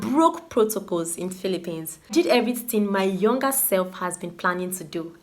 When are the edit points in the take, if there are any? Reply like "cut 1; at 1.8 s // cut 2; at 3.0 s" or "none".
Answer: cut 1; at 2.1 s